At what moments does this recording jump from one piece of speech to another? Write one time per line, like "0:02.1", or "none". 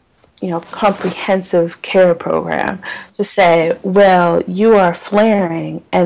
none